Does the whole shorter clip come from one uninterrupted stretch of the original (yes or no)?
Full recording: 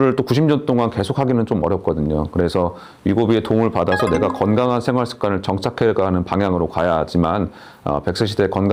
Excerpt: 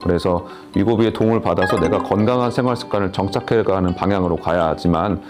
yes